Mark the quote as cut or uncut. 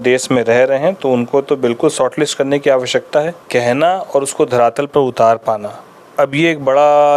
cut